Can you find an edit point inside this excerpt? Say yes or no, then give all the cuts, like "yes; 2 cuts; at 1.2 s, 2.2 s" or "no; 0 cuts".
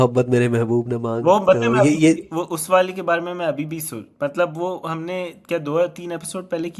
no; 0 cuts